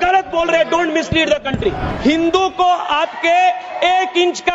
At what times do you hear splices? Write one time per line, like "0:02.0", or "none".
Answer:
0:01.9